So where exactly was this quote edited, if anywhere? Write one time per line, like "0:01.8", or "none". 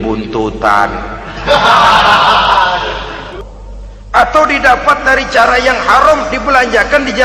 0:03.2